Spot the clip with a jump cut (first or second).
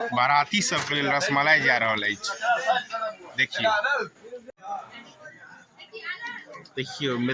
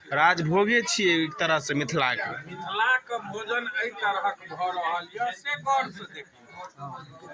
first